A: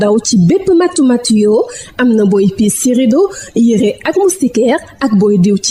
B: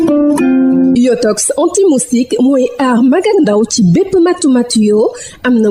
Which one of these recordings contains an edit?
B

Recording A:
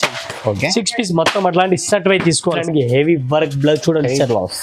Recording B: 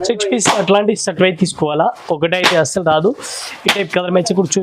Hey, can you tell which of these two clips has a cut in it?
A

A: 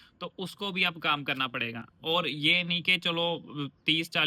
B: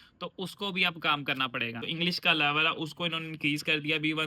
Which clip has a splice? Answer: B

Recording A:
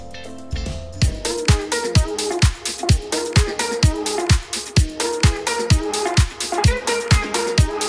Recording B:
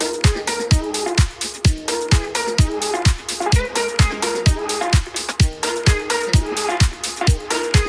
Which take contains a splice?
A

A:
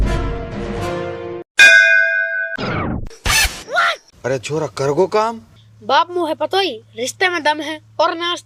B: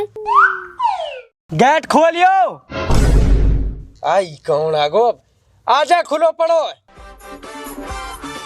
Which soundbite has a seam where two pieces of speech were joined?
B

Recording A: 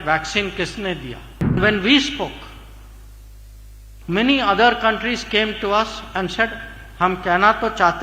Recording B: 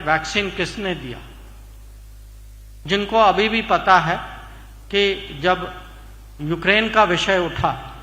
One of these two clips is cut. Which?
A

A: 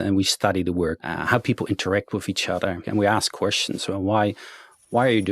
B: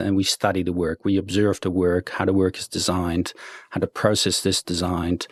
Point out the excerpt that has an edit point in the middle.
A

